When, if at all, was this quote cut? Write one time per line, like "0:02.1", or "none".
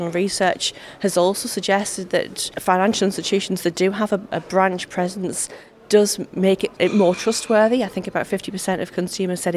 0:02.4
0:06.7